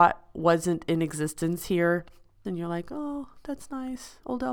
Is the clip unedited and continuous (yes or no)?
no